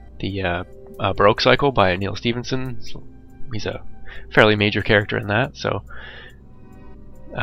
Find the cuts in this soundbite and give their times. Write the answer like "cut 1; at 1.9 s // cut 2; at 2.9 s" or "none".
cut 1; at 1.3 s